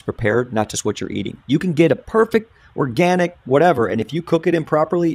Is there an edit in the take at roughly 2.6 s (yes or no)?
no